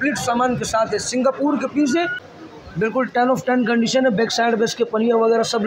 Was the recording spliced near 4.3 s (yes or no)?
no